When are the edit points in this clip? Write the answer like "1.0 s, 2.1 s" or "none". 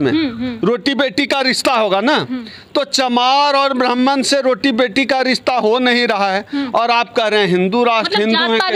none